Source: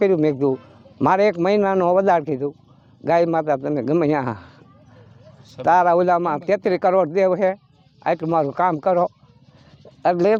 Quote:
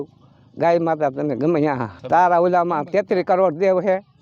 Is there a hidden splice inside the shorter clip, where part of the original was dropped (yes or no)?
yes